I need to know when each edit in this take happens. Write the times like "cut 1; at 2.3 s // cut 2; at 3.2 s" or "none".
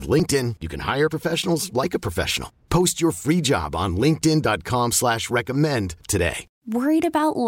cut 1; at 6.4 s